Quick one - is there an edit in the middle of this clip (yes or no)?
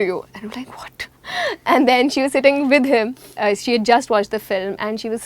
no